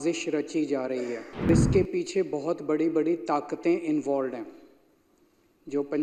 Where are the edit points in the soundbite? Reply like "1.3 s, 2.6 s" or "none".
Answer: 1.5 s

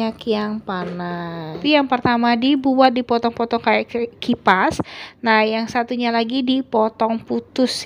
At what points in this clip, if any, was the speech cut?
1.6 s

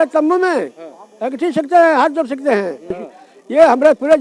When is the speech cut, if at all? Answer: 3.1 s

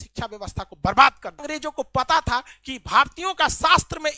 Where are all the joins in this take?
1.5 s

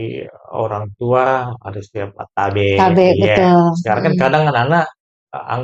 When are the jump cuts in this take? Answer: none

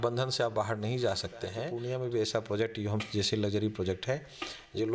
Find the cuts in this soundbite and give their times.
1.7 s

